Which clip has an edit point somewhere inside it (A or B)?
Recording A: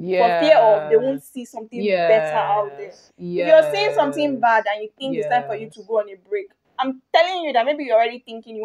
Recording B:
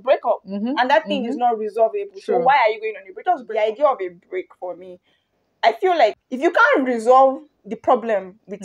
B